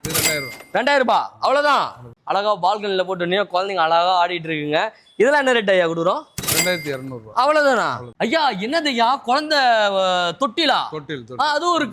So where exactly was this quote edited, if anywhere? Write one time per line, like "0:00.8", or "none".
0:02.0
0:08.1